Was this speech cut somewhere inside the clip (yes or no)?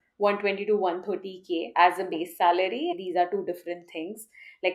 yes